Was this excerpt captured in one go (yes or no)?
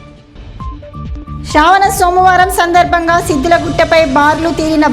no